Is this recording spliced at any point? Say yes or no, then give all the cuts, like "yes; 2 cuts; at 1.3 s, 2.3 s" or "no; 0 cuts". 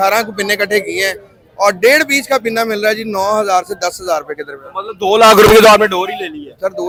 no; 0 cuts